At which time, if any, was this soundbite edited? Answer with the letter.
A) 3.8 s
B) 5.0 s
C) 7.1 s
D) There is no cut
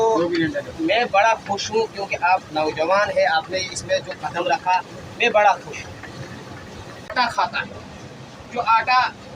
C